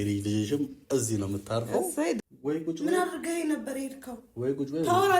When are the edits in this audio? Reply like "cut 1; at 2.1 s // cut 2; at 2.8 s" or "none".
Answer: cut 1; at 2.2 s